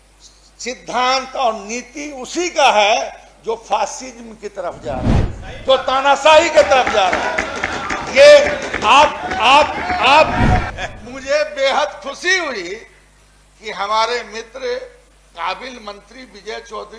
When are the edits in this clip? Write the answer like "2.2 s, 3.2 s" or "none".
10.8 s